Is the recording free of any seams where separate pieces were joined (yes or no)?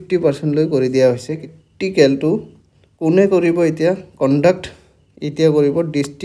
no